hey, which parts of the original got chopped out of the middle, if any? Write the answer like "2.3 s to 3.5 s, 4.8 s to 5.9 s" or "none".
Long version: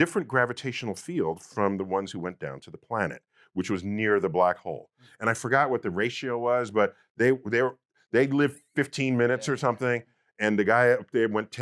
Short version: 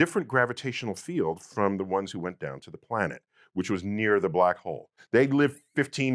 4.9 s to 7.9 s